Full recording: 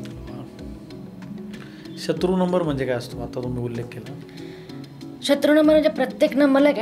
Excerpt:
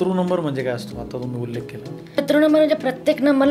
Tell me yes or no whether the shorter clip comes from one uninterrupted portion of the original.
no